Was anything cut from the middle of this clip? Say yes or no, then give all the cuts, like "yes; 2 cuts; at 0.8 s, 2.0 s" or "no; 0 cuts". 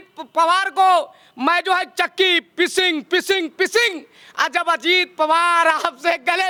no; 0 cuts